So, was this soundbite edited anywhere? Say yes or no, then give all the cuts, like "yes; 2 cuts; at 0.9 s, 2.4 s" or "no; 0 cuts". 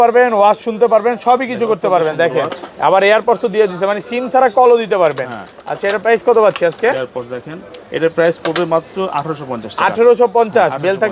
no; 0 cuts